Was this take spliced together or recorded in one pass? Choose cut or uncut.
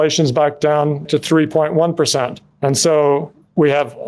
cut